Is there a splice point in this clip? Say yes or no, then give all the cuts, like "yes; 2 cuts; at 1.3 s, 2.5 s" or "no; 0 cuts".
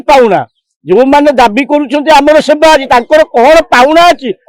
no; 0 cuts